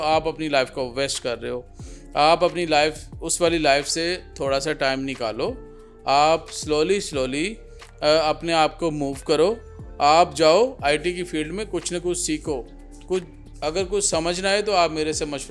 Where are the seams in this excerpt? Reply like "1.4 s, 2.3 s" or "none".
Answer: none